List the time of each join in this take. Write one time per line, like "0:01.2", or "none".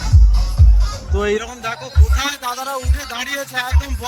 none